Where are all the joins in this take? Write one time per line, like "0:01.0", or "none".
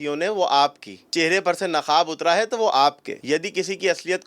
0:01.1
0:03.1